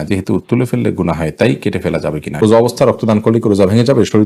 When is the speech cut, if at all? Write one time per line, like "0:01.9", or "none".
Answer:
0:02.4